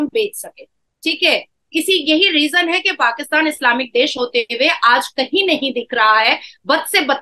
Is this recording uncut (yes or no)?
yes